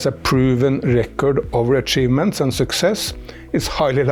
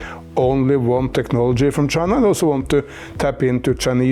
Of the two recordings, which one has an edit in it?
second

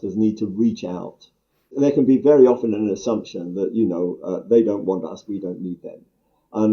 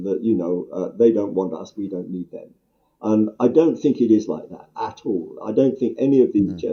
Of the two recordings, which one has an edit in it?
first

